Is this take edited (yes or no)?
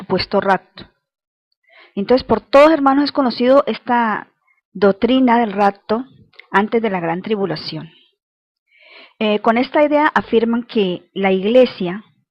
yes